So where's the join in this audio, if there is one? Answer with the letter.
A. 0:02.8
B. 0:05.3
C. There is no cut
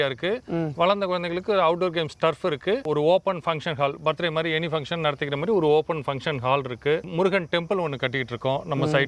A